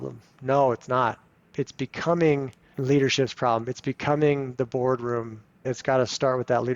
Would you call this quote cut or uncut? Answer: cut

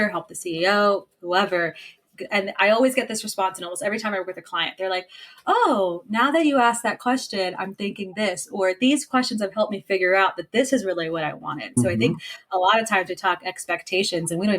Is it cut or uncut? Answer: cut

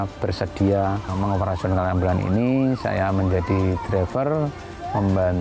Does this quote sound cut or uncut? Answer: cut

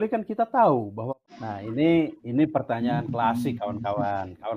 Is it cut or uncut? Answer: cut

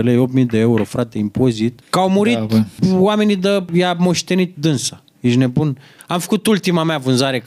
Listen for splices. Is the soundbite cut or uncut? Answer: cut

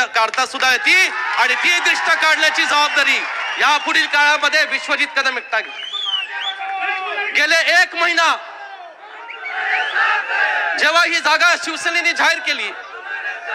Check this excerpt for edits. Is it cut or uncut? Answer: uncut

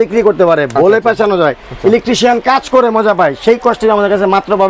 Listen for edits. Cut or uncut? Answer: uncut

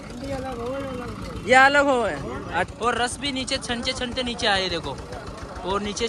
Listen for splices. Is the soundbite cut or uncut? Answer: cut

